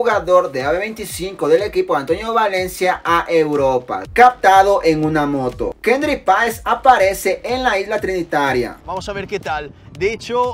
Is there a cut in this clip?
yes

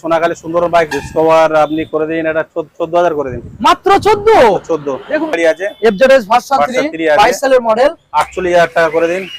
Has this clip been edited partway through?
yes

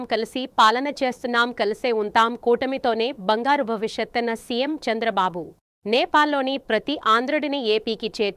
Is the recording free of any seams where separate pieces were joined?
yes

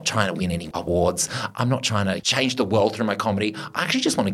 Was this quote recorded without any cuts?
no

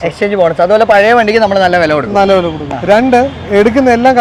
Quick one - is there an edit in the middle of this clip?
no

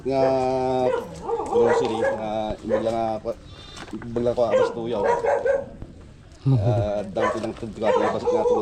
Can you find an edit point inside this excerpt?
no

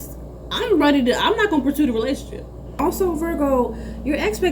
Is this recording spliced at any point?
yes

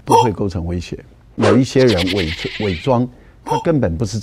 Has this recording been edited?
yes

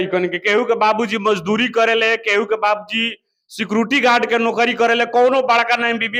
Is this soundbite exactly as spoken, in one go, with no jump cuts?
yes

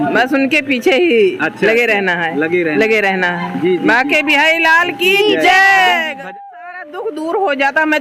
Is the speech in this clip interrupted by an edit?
yes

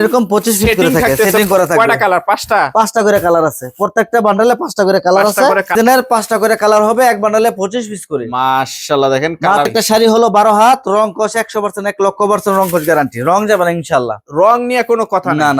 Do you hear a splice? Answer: yes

